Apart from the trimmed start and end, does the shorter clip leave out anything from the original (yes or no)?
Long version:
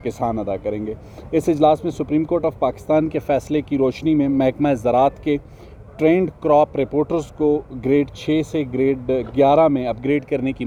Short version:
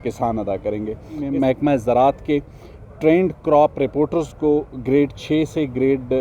yes